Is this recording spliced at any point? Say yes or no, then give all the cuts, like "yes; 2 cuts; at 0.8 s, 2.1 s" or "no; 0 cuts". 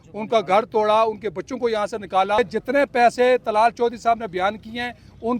yes; 1 cut; at 2.4 s